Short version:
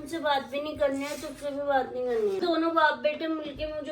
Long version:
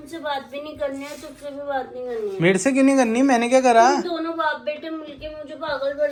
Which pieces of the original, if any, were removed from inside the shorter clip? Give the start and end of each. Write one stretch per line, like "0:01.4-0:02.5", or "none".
0:02.4-0:04.0